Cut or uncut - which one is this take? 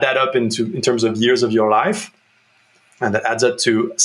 uncut